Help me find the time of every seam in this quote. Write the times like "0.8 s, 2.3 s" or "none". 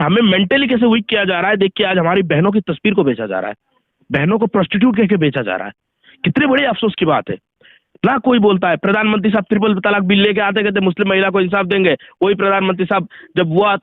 none